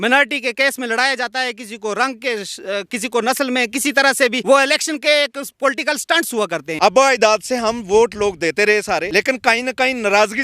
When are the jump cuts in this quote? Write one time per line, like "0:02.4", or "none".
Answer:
0:04.4
0:06.7
0:09.1